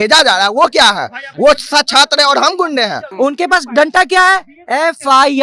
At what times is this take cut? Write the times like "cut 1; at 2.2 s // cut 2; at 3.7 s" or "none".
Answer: cut 1; at 3.0 s